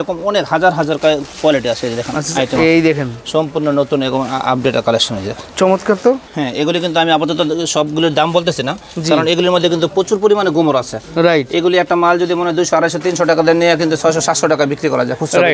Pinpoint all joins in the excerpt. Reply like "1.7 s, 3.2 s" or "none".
none